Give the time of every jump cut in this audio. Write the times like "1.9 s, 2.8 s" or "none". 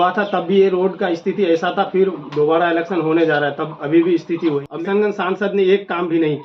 4.6 s